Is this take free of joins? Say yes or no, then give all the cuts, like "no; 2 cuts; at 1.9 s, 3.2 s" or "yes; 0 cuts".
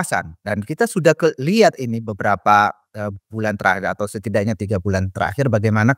yes; 0 cuts